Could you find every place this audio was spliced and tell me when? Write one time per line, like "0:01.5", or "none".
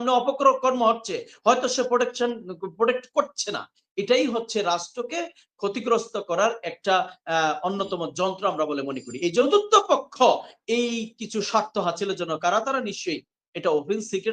0:09.5